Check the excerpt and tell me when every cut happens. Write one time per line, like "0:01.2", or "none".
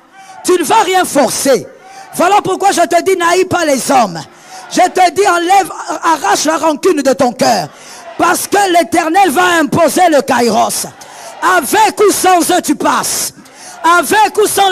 none